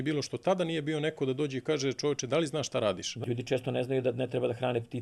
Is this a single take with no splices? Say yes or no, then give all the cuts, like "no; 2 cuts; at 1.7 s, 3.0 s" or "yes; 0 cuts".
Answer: no; 1 cut; at 3.1 s